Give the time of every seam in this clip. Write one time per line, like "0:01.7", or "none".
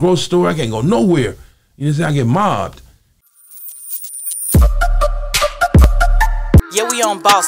0:03.2